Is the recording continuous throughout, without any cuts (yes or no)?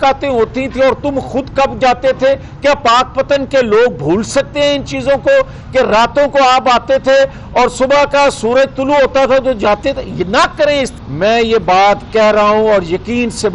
no